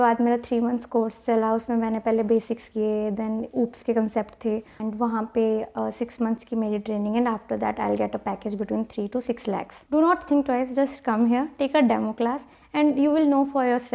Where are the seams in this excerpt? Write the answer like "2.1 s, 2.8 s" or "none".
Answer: 4.8 s, 9.8 s

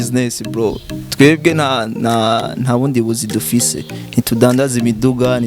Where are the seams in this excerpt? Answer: none

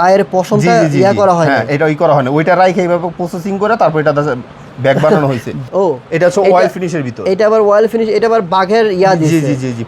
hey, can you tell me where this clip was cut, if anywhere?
5.6 s

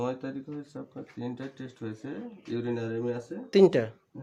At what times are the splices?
none

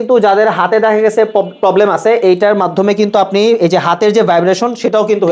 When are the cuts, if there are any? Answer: none

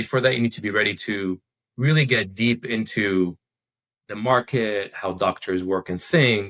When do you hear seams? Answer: none

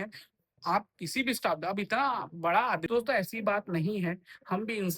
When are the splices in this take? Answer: 2.8 s

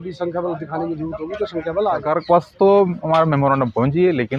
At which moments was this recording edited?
2.1 s

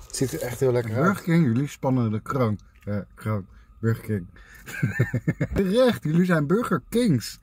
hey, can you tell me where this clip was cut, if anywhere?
0.9 s, 5.5 s

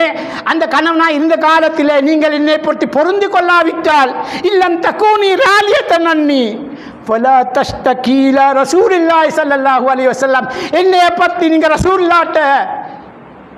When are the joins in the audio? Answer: none

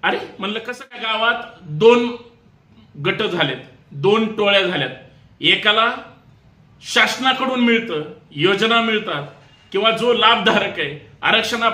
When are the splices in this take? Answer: 1.1 s

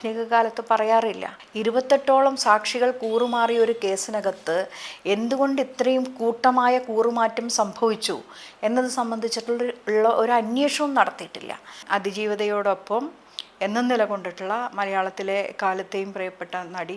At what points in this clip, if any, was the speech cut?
1.4 s, 11.8 s

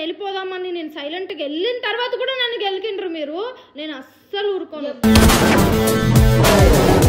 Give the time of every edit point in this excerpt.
none

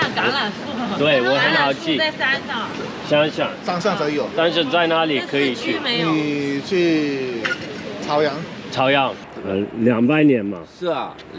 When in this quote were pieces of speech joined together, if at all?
9.2 s

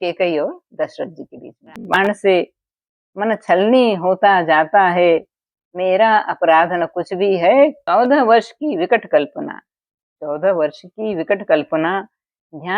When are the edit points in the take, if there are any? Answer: 2.0 s, 7.8 s

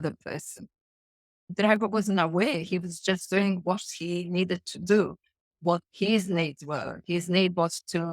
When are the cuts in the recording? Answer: 1.5 s

